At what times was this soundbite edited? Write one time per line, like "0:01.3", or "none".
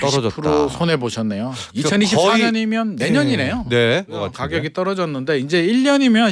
0:04.3